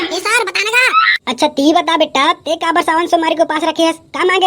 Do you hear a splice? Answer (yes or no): yes